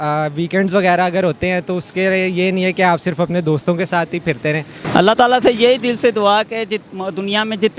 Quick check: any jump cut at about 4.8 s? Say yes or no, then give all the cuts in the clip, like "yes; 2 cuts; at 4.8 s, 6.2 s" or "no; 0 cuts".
yes; 1 cut; at 4.8 s